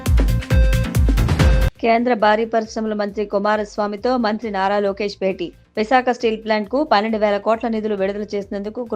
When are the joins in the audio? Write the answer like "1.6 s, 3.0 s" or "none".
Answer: 1.2 s

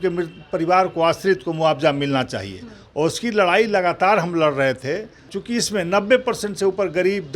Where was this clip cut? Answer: 5.3 s

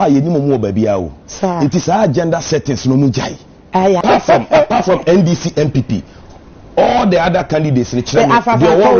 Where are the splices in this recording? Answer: 4.0 s

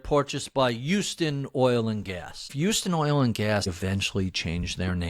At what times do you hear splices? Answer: 2.4 s, 3.7 s

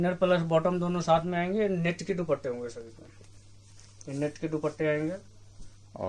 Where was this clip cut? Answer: none

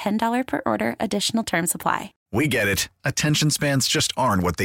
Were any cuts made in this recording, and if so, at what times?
2.1 s

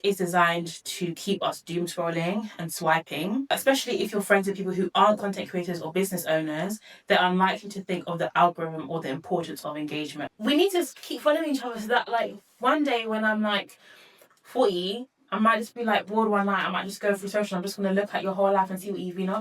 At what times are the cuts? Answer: 3.5 s, 10.3 s

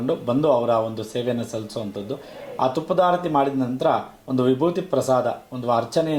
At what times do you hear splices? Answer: none

